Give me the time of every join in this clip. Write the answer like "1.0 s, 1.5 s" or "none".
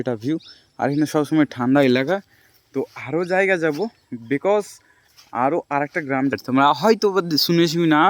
6.3 s

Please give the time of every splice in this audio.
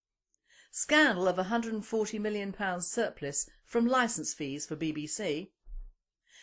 none

